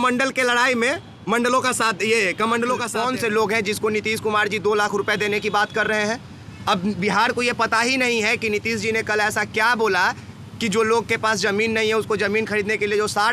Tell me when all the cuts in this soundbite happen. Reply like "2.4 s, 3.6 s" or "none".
2.9 s